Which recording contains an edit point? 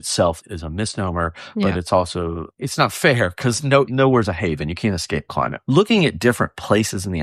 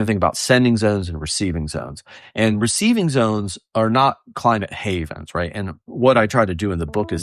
first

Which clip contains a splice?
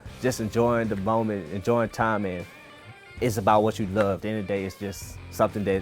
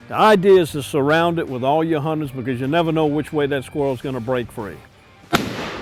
first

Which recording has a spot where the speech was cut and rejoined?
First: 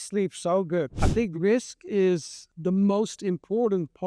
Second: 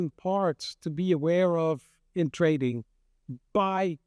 first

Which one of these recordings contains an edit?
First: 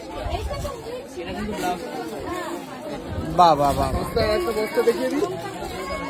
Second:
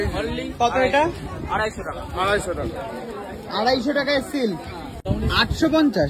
second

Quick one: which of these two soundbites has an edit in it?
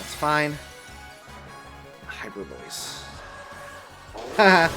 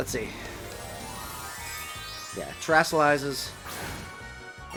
first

